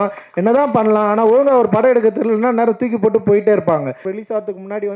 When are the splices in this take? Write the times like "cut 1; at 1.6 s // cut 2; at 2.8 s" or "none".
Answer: cut 1; at 4.0 s